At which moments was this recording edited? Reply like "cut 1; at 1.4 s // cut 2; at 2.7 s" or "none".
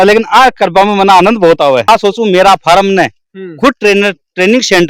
cut 1; at 1.9 s